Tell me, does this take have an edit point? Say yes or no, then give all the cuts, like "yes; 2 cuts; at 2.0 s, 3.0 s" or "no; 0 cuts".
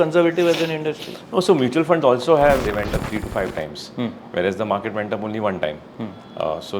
yes; 1 cut; at 2.6 s